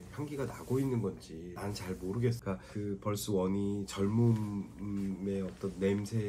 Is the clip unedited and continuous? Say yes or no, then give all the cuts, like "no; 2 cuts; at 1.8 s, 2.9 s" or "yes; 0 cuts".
no; 2 cuts; at 1.5 s, 2.4 s